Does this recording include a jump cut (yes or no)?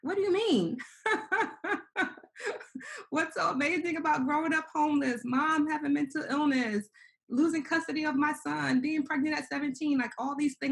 no